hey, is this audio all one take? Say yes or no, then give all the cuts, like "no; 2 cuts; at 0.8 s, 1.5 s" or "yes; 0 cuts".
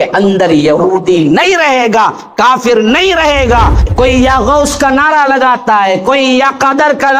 no; 1 cut; at 3.8 s